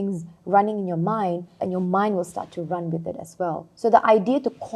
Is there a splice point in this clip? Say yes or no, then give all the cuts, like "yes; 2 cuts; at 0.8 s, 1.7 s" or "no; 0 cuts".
yes; 2 cuts; at 1.6 s, 3.7 s